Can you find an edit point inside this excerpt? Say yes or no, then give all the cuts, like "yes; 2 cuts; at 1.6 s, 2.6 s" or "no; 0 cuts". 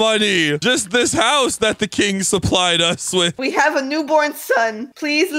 no; 0 cuts